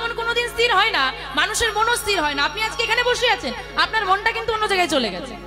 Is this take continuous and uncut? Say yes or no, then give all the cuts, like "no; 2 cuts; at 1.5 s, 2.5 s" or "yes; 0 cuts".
yes; 0 cuts